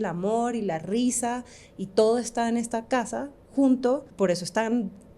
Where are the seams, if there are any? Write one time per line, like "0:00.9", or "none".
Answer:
0:04.1